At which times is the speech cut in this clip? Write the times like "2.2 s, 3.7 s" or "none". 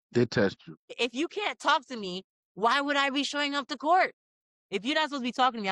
none